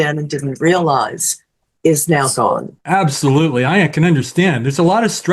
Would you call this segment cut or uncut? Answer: cut